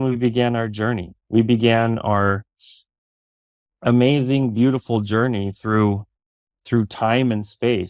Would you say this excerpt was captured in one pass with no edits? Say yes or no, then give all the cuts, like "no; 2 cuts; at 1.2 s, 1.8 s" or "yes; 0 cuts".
yes; 0 cuts